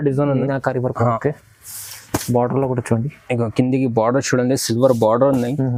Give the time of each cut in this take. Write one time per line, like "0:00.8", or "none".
none

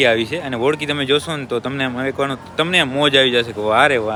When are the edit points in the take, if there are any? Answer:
none

